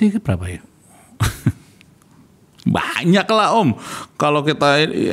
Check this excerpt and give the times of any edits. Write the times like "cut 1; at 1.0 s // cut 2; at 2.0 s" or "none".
none